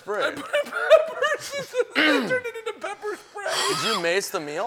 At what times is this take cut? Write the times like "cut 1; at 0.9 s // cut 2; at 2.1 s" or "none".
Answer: none

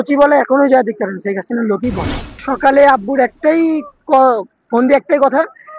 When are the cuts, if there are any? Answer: cut 1; at 2.4 s

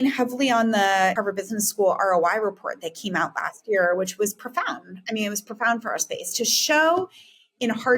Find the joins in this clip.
cut 1; at 1.2 s

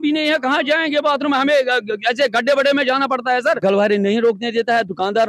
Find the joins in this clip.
cut 1; at 3.6 s

